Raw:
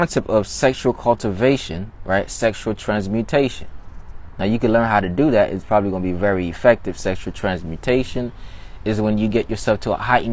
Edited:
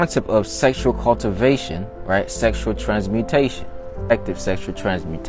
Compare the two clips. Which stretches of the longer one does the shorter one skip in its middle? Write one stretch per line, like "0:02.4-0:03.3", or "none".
0:04.1-0:06.7